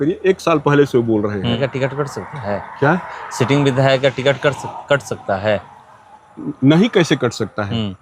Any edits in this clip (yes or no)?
yes